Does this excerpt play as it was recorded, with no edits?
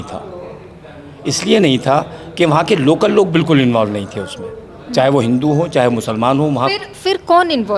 yes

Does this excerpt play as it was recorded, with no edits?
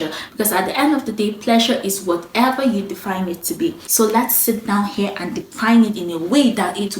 no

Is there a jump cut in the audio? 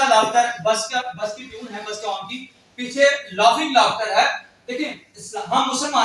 no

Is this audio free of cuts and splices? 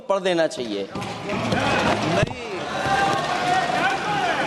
yes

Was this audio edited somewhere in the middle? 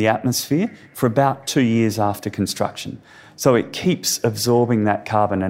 no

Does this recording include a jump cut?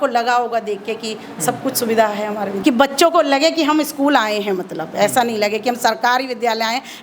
yes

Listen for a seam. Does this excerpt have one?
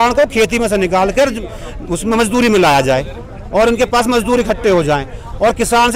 no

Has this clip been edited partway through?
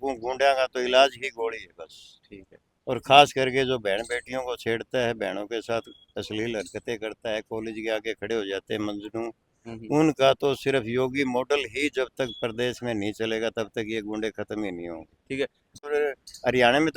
yes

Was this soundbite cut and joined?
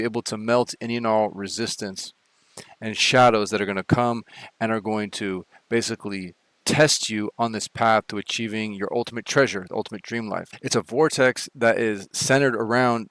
no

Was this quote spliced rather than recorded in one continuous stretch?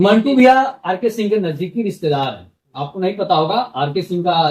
no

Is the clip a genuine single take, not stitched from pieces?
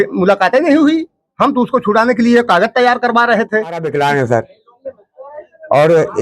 no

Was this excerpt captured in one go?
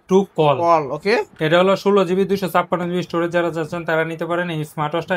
yes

